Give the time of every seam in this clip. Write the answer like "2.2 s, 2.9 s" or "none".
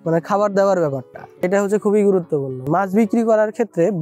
1.4 s, 2.5 s